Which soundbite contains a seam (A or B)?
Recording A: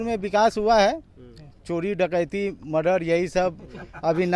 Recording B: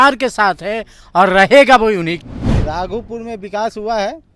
B